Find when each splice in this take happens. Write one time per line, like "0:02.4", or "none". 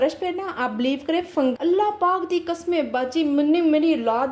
0:01.5